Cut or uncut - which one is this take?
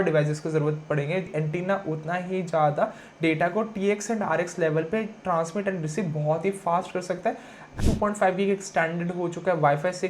cut